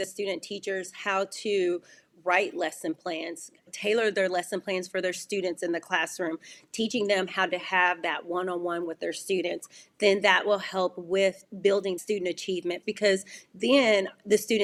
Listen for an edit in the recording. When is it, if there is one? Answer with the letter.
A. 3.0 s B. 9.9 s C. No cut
C